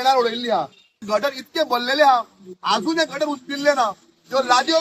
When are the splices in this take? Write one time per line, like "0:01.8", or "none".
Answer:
0:01.0